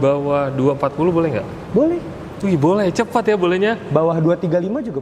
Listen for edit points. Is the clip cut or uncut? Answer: uncut